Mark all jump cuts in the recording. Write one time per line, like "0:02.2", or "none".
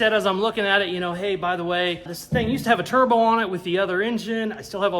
none